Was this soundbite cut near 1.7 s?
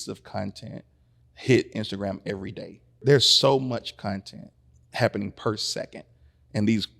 no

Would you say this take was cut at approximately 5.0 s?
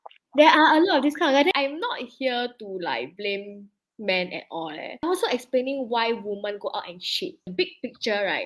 yes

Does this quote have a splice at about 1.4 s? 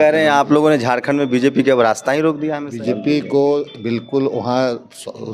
no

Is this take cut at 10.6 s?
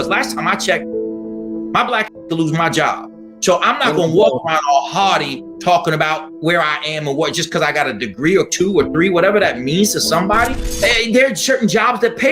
yes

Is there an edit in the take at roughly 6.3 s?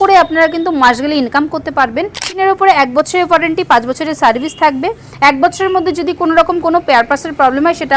no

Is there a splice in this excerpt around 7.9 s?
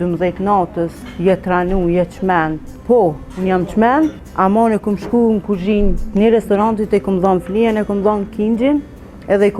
no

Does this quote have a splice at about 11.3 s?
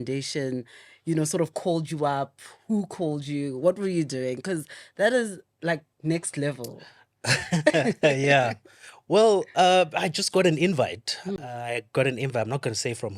no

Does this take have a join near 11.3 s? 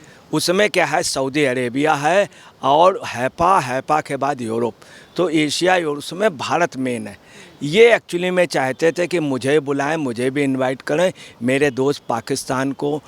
no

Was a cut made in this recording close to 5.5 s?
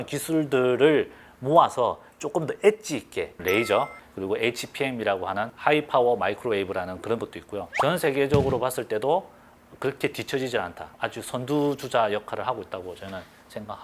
yes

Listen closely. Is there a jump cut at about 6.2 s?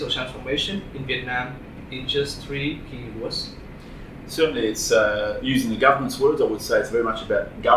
no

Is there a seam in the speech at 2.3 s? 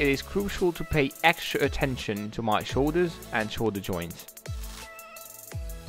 no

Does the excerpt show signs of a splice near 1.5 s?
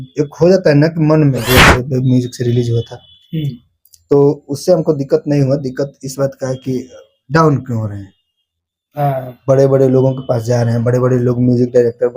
yes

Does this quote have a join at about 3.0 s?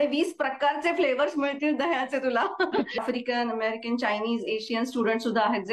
yes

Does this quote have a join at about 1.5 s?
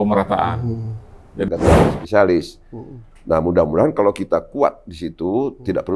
yes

